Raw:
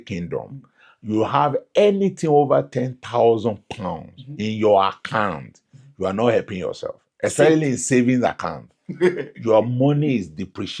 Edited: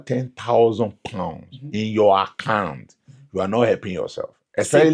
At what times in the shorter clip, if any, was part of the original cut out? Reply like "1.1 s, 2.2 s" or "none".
none